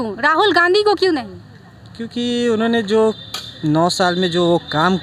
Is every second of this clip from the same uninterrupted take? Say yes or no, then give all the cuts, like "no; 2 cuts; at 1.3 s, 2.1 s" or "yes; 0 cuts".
yes; 0 cuts